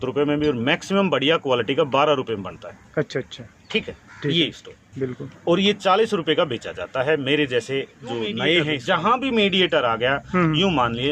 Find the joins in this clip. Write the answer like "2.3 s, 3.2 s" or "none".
8.8 s